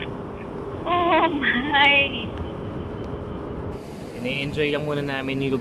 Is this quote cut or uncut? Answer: cut